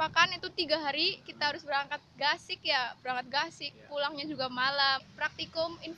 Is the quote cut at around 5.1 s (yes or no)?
yes